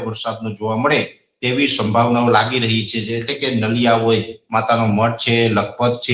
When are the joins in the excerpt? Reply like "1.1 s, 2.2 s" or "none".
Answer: none

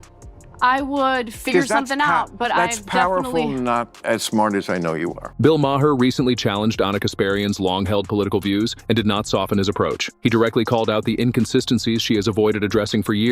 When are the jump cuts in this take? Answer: 5.2 s

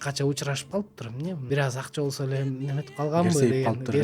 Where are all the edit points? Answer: 1.4 s

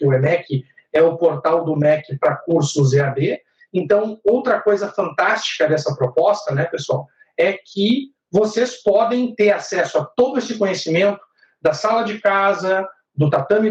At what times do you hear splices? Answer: none

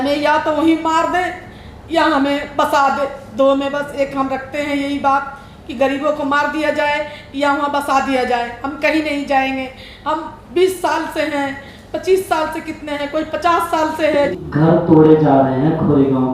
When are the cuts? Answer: 14.4 s

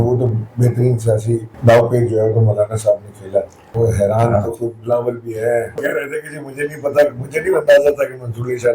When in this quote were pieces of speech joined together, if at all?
1.5 s, 3.6 s, 5.8 s

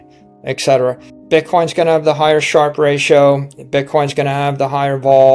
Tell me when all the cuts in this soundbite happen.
1.1 s

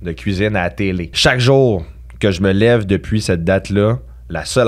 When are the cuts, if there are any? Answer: 1.1 s

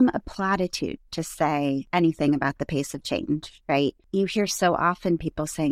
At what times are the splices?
1.9 s, 4.0 s

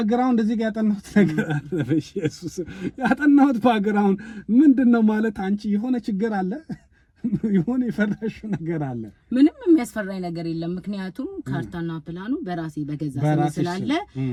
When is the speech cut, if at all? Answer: none

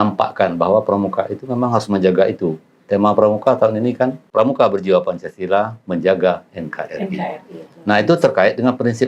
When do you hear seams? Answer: 4.2 s

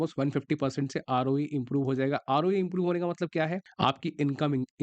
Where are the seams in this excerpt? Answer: 3.6 s

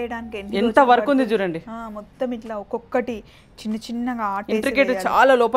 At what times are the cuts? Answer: none

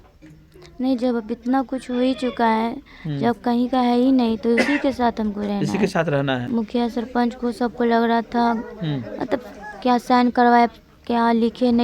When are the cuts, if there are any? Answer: 6.5 s

